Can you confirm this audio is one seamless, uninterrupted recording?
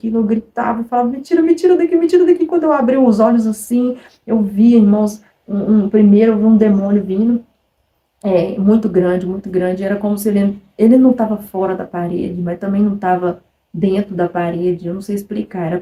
yes; 0 cuts

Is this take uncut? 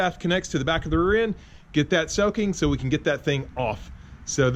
yes; 0 cuts

